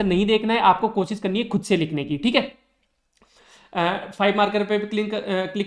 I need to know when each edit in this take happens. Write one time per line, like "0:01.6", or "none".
none